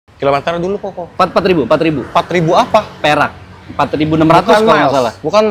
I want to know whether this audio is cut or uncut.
uncut